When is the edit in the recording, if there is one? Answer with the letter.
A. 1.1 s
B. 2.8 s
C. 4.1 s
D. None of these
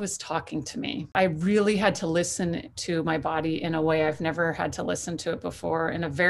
A